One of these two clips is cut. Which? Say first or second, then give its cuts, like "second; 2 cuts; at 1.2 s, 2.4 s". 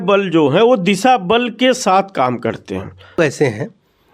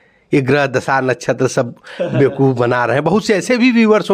first; 1 cut; at 3.2 s